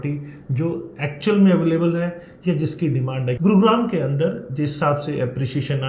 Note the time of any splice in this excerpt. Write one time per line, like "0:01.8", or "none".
0:03.4